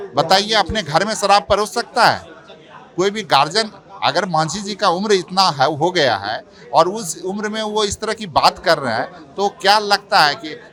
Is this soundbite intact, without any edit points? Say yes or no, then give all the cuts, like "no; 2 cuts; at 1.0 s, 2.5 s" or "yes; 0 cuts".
yes; 0 cuts